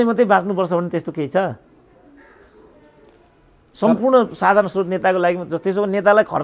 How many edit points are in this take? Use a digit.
0